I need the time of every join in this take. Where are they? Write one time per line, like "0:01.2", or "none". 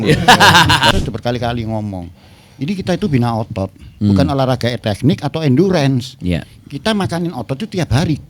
0:00.9